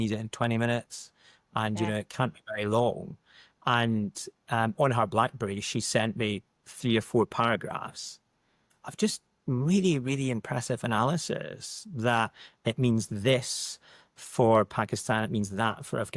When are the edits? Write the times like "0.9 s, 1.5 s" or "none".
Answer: none